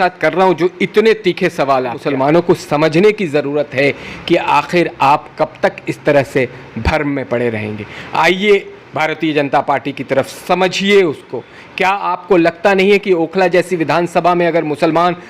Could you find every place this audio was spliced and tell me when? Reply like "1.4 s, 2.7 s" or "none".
2.0 s

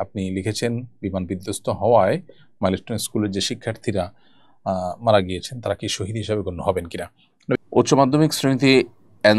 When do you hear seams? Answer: 7.6 s

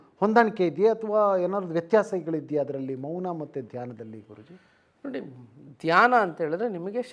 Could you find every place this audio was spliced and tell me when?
none

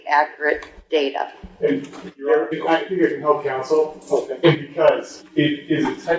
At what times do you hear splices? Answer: none

